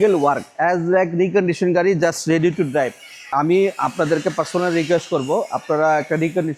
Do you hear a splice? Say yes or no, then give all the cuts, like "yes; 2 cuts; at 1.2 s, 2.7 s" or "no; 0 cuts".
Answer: no; 0 cuts